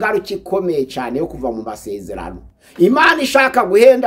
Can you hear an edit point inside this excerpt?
no; 0 cuts

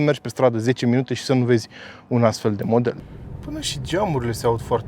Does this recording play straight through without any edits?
no; 1 cut; at 3.0 s

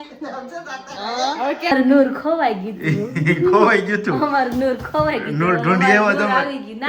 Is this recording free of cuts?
no; 1 cut; at 1.7 s

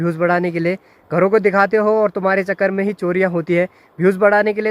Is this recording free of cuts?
yes; 0 cuts

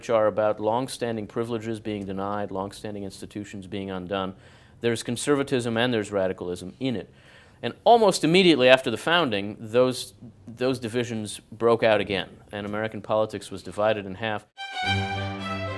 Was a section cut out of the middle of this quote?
yes; 1 cut; at 14.6 s

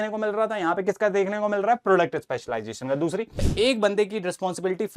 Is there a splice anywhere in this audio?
yes; 1 cut; at 3.5 s

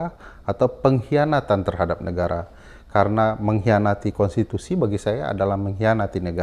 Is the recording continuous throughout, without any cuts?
yes; 0 cuts

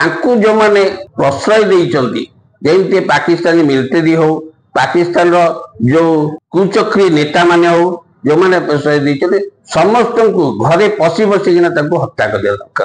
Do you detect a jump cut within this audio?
yes; 2 cuts; at 1.0 s, 6.4 s

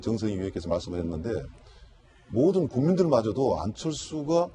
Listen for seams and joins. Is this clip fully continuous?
yes; 0 cuts

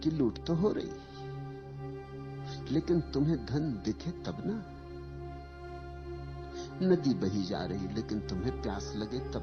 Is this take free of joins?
no; 2 cuts; at 4.6 s, 6.8 s

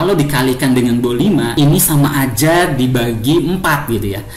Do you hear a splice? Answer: yes; 1 cut; at 1.5 s

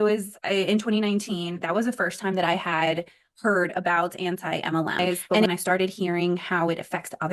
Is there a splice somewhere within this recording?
yes; 1 cut; at 5.5 s

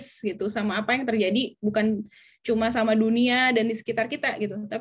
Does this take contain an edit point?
no; 0 cuts

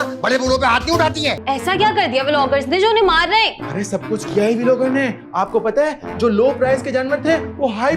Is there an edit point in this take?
yes; 1 cut; at 1.4 s

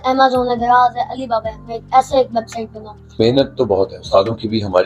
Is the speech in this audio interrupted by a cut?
yes; 1 cut; at 3.2 s

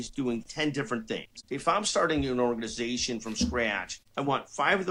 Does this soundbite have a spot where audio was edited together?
no; 0 cuts

